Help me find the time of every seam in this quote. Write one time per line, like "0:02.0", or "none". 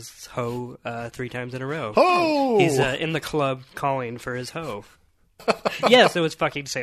0:05.4